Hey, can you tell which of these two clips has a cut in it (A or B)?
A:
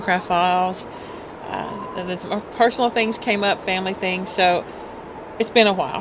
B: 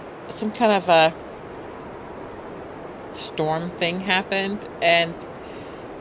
B